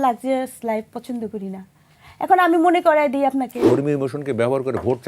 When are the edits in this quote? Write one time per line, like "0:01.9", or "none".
0:03.6